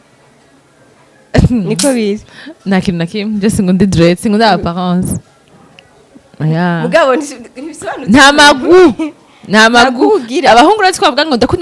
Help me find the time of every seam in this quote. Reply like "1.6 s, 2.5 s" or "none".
none